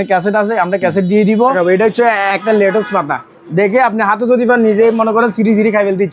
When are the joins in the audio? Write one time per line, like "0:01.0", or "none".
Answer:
0:01.5